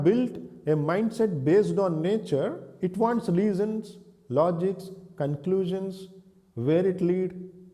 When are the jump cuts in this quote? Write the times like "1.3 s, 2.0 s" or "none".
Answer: 2.6 s